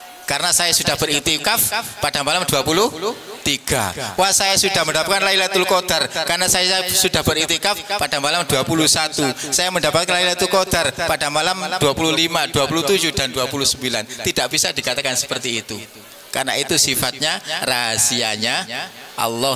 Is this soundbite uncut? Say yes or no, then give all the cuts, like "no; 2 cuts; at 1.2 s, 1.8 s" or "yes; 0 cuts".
yes; 0 cuts